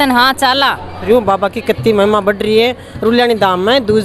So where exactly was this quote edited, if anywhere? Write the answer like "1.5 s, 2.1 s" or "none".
0.9 s

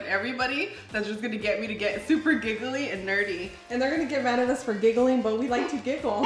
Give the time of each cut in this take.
3.5 s

